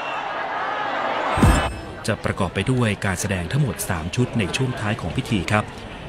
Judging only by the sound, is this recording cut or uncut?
cut